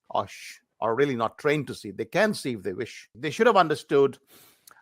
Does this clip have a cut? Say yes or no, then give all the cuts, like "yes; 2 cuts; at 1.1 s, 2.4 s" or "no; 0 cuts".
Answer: yes; 1 cut; at 3.2 s